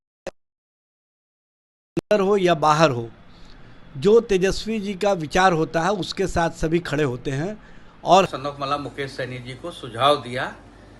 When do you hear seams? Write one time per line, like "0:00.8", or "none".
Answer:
0:08.3